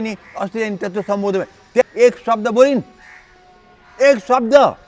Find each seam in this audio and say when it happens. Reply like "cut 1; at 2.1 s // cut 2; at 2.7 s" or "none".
cut 1; at 1.8 s